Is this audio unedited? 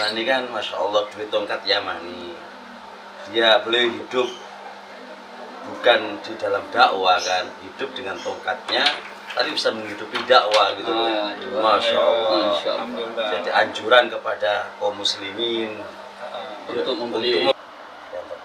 no; 1 cut; at 17.5 s

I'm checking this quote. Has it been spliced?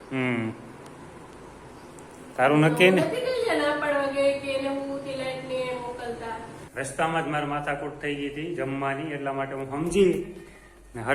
yes; 1 cut; at 6.6 s

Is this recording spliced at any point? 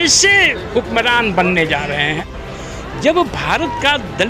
yes; 1 cut; at 2.2 s

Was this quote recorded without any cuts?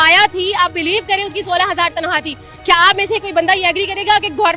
yes; 0 cuts

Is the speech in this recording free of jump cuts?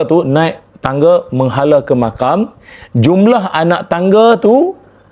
yes; 0 cuts

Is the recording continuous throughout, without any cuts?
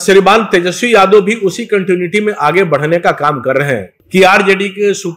no; 1 cut; at 4.0 s

